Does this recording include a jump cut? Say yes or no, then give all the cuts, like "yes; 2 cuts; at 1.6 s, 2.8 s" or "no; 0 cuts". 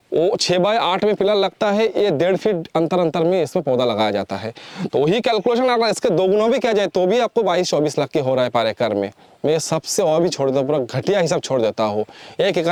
no; 0 cuts